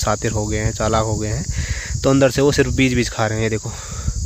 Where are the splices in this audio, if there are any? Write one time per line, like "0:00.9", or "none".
none